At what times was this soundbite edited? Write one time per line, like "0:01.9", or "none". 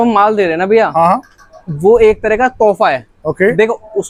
none